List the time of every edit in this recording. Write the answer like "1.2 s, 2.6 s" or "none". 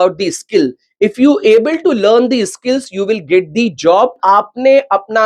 4.2 s